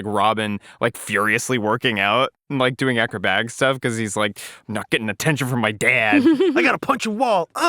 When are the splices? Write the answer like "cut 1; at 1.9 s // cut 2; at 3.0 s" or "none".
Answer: cut 1; at 6.7 s